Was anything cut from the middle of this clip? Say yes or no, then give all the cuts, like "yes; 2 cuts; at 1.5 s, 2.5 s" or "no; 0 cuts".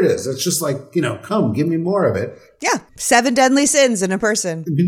yes; 1 cut; at 2.8 s